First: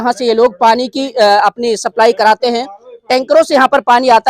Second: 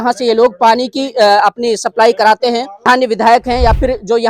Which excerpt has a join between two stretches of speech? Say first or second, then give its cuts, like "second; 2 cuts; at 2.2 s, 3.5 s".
second; 1 cut; at 2.7 s